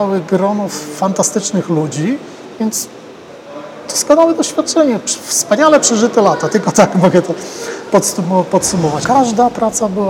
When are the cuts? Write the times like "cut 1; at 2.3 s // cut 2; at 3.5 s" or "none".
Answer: cut 1; at 9.0 s